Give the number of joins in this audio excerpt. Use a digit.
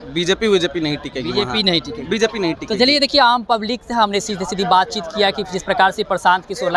0